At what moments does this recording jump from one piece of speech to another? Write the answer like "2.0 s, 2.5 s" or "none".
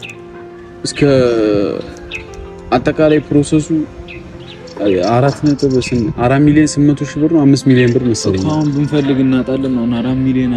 none

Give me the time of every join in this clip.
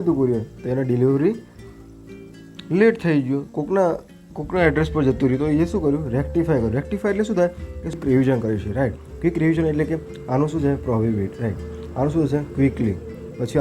8.0 s

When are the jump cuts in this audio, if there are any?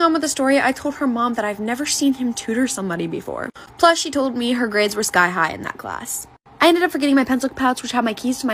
2.4 s

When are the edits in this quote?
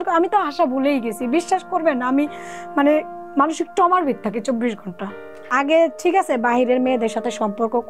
5.3 s

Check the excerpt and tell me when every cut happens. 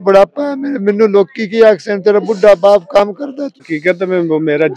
3.7 s

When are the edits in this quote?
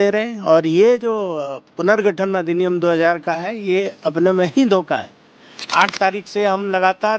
5.5 s

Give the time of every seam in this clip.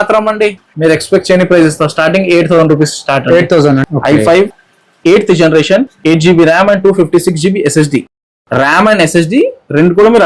3.8 s

